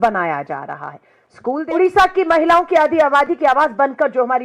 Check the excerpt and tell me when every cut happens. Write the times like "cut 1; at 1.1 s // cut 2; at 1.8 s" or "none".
cut 1; at 1.6 s